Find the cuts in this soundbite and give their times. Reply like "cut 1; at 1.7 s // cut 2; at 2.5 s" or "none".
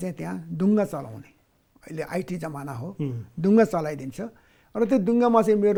none